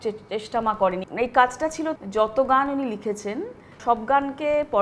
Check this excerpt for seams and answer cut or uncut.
cut